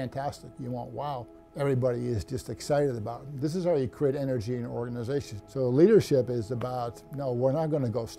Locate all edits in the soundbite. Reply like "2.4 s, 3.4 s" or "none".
5.4 s